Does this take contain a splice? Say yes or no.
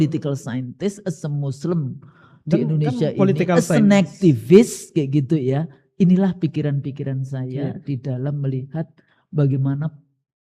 no